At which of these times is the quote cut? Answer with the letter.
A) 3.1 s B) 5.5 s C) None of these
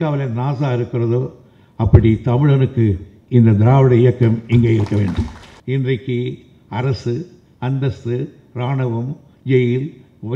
B